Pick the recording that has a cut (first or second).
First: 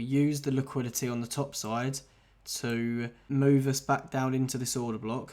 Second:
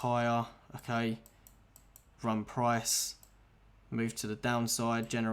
first